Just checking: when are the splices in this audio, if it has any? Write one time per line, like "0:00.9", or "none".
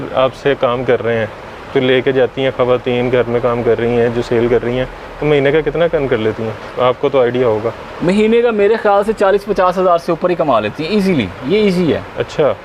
none